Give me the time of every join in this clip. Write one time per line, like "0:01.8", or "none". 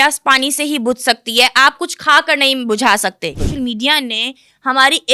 0:03.4